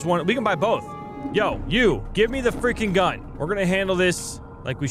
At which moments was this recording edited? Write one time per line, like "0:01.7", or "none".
0:01.1
0:03.3